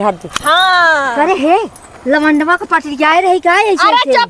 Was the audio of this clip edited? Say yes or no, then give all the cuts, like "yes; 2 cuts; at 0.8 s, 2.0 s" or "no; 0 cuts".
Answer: no; 0 cuts